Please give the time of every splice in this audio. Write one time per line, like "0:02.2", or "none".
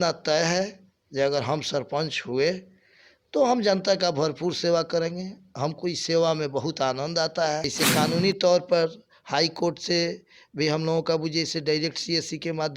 0:07.7